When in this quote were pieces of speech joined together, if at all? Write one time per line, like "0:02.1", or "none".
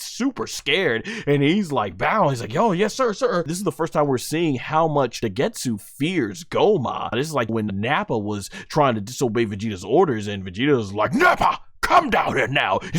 0:03.5
0:05.2
0:07.5